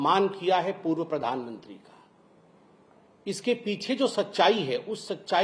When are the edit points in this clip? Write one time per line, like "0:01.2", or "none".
none